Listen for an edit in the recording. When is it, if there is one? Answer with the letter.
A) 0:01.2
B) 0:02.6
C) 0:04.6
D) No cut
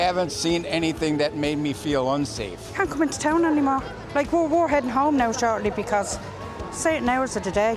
B